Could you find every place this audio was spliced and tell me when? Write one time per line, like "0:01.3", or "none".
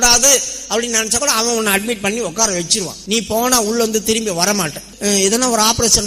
0:03.0
0:04.9